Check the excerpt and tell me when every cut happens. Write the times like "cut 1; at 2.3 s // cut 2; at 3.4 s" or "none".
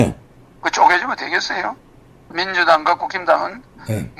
cut 1; at 2.3 s